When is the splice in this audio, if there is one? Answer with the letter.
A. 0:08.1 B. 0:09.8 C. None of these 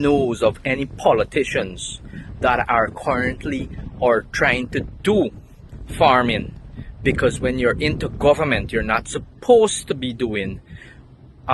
B